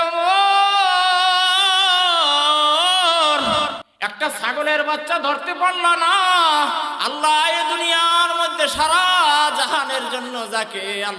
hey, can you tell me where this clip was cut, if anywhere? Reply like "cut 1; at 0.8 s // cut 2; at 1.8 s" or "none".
cut 1; at 3.8 s